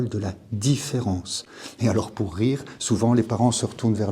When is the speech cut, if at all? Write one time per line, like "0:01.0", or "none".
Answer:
none

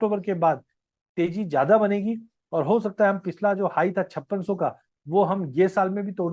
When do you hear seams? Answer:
none

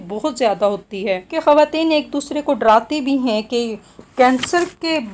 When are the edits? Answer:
0:01.3

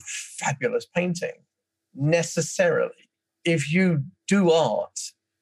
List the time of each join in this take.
0:04.1

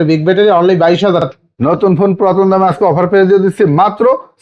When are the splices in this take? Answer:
0:01.3

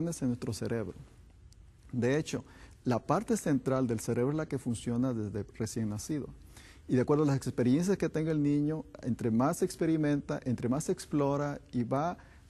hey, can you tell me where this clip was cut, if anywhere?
0:11.6

